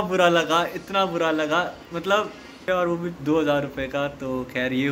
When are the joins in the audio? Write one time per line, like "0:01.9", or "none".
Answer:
0:02.6